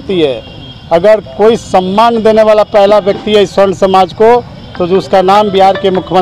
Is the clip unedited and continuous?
yes; 0 cuts

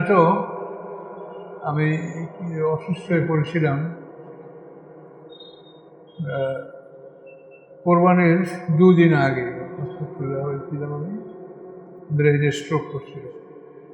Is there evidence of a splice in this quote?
no; 0 cuts

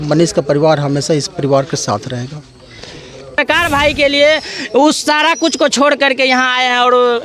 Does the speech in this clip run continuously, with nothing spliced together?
no; 1 cut; at 3.4 s

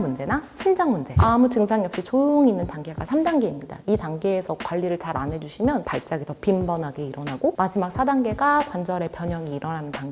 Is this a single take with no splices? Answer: no; 3 cuts; at 1.1 s, 5.8 s, 7.5 s

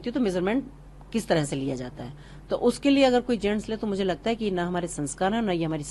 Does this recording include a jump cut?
no; 0 cuts

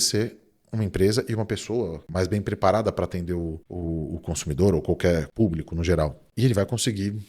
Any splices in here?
yes; 4 cuts; at 2.0 s, 3.7 s, 5.3 s, 6.2 s

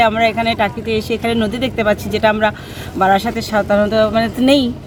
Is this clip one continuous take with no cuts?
yes; 0 cuts

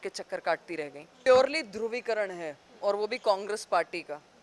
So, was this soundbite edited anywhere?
yes; 1 cut; at 1.1 s

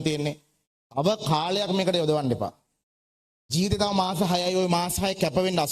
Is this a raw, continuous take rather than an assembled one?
yes; 0 cuts

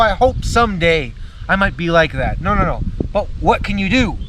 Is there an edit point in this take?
yes; 1 cut; at 3.3 s

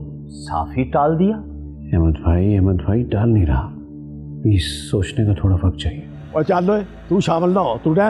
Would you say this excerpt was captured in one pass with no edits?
no; 1 cut; at 6.2 s

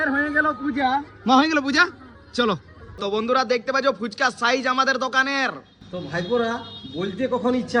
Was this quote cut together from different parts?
yes; 1 cut; at 2.9 s

